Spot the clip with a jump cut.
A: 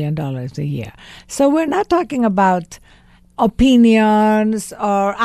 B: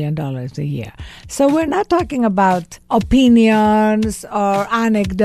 B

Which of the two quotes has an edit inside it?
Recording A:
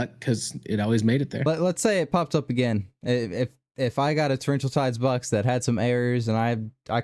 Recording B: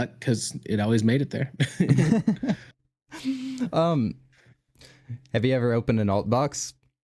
A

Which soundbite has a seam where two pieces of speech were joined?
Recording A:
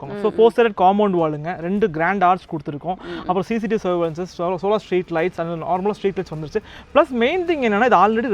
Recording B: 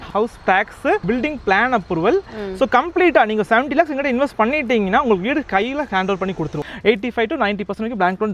B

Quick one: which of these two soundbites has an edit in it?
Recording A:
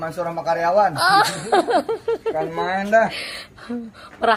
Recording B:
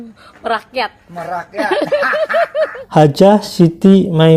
B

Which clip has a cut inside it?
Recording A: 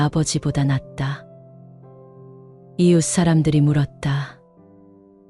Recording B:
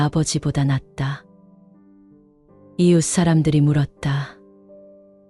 A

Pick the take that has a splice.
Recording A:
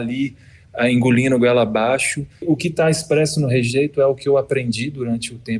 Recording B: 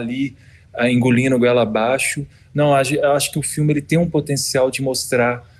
A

